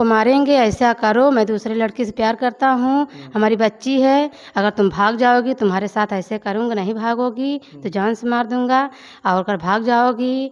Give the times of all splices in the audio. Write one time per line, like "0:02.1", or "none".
none